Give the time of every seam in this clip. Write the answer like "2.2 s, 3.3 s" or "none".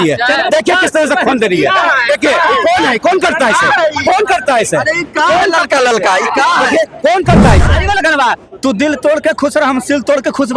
7.7 s